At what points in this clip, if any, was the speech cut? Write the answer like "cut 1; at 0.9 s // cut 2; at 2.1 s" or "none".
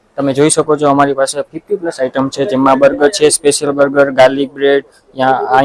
none